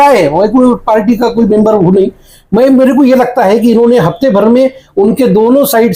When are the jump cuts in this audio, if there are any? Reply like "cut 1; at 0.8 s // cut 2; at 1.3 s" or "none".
none